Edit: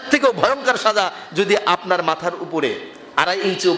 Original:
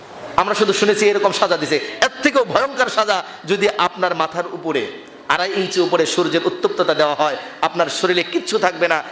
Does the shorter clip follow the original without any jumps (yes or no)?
yes